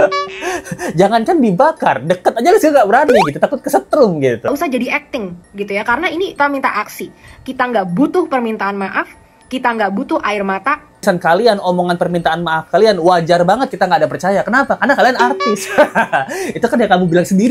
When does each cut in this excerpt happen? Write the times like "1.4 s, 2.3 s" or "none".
4.5 s, 6.4 s, 11.0 s